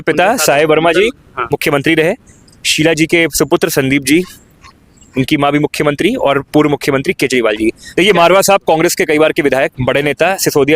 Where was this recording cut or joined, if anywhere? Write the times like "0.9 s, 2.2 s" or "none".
7.8 s